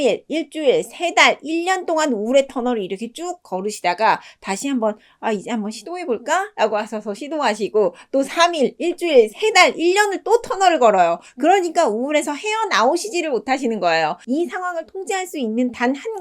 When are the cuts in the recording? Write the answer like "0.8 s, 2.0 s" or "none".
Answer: 14.2 s